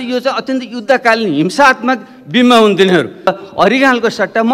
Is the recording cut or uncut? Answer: cut